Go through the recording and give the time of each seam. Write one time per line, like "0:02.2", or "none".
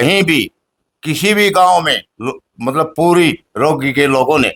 none